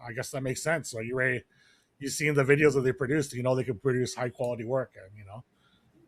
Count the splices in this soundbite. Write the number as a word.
zero